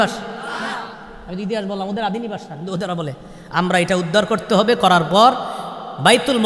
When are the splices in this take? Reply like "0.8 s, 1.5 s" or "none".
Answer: none